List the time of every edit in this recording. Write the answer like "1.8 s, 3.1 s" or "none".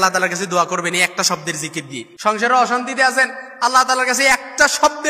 2.1 s